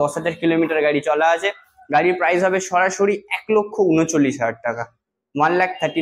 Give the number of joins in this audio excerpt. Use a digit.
0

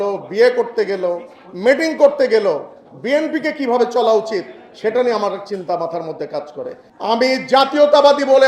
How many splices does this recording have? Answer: 1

